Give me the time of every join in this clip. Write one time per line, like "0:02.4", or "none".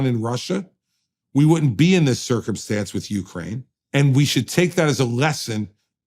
0:03.7